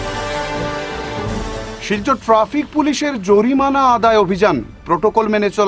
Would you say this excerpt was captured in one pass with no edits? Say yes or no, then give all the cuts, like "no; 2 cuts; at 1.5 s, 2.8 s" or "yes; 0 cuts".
no; 1 cut; at 1.0 s